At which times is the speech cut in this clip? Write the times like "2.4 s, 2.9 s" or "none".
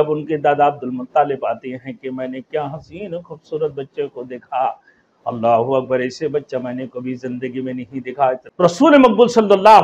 8.5 s

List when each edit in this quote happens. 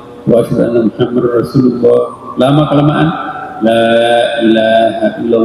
none

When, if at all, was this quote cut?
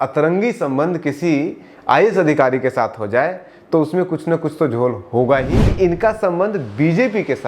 5.6 s

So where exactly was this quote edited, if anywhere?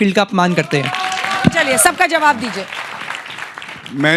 none

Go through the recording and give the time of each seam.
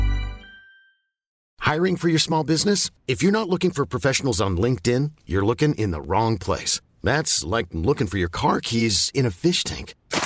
1.3 s

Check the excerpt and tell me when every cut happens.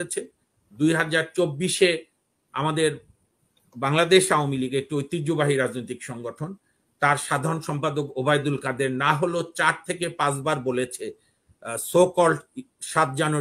none

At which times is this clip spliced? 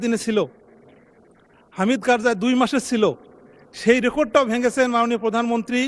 none

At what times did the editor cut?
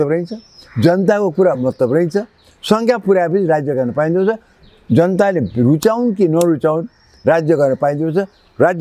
none

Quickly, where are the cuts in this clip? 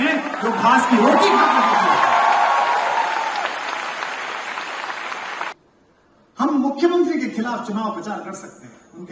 5.5 s

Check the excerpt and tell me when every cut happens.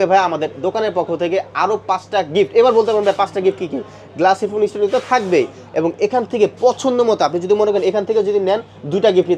none

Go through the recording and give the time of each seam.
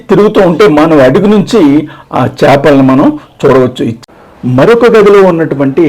4.0 s

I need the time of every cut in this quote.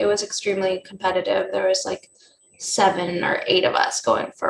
none

